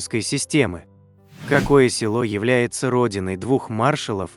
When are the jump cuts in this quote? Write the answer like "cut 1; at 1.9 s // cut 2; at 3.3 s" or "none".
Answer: cut 1; at 0.9 s